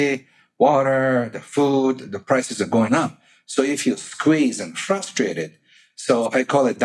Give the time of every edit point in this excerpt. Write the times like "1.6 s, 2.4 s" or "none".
none